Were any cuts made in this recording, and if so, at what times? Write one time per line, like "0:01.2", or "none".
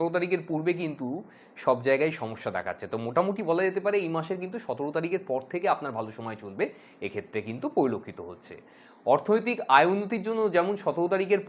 0:08.6